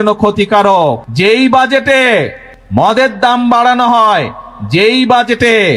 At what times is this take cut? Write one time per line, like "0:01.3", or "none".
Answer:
0:01.1